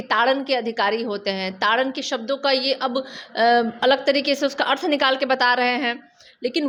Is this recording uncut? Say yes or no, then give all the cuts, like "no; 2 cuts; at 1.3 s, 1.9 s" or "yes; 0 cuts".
yes; 0 cuts